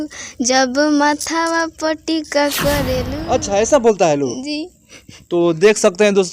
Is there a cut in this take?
yes; 1 cut; at 3.1 s

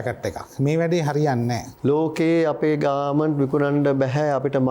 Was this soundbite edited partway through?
yes; 1 cut; at 1.7 s

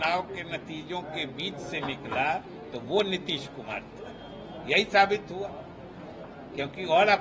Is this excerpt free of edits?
yes; 0 cuts

